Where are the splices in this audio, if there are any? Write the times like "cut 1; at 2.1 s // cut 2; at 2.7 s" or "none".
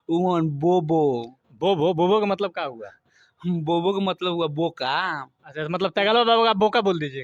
none